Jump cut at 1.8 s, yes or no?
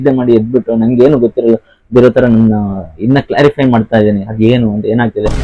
no